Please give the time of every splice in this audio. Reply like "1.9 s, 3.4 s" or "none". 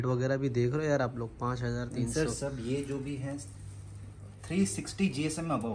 none